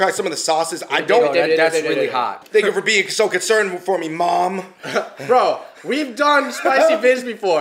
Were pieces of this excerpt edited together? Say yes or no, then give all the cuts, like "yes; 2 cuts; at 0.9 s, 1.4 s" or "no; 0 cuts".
yes; 1 cut; at 2.4 s